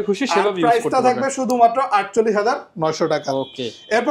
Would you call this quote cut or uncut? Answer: uncut